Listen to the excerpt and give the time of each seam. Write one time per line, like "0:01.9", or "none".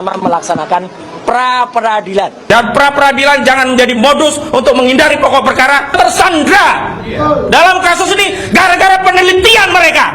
0:02.4
0:05.9

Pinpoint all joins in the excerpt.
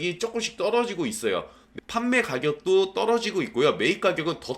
none

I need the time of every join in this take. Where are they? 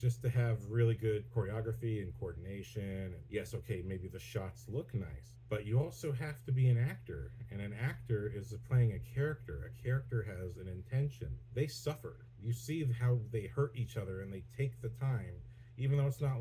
0:01.3
0:03.2
0:05.3
0:11.3

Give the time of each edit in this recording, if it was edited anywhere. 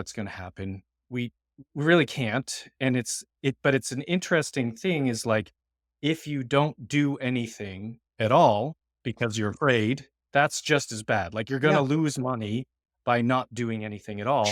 none

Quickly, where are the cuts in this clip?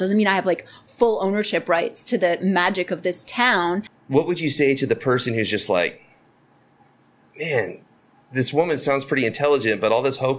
0:04.0

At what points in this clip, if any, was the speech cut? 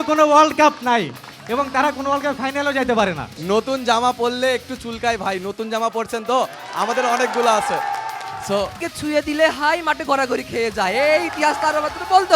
0:03.4
0:08.9

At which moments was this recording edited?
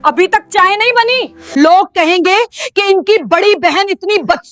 0:01.4

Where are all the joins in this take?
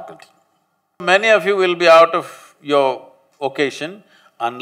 0:01.0

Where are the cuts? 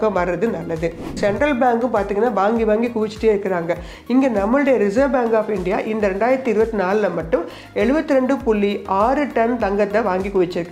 0:01.1

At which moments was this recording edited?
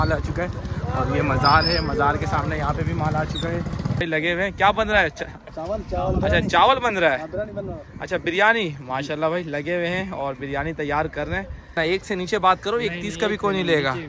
0:04.0
0:11.8

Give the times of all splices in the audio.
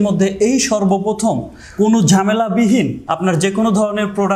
0:03.0

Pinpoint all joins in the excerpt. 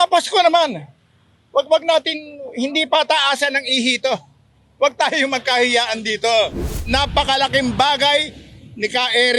0:06.7

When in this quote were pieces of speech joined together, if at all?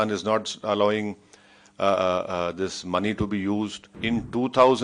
0:03.9

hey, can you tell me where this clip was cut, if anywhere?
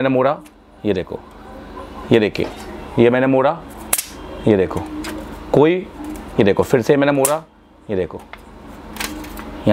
none

